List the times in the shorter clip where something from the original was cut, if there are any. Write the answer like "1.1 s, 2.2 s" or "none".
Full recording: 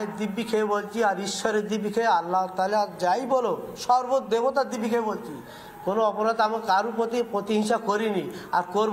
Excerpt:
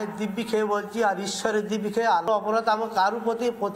2.3 s